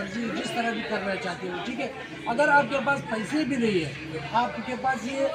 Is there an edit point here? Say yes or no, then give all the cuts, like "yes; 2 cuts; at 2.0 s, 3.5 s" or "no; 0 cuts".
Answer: no; 0 cuts